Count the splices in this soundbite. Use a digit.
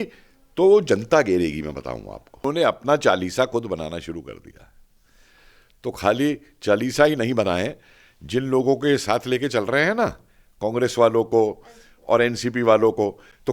1